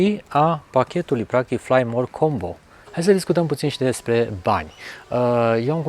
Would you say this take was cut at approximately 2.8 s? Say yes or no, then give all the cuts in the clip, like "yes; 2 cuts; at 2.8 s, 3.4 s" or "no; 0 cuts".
yes; 1 cut; at 2.8 s